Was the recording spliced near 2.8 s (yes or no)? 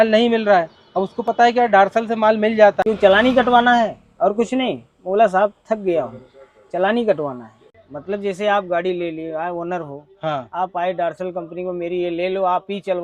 yes